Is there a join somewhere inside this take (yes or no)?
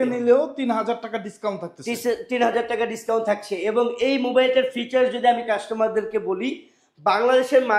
no